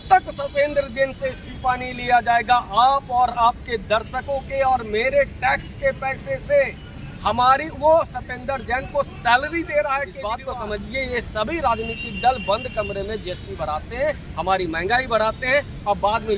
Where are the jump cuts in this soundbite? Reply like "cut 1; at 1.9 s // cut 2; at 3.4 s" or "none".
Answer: cut 1; at 10.1 s